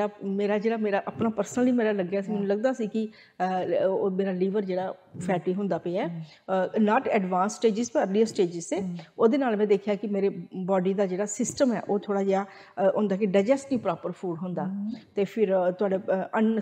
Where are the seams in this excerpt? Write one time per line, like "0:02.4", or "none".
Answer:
none